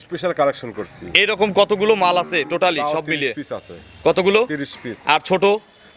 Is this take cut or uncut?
uncut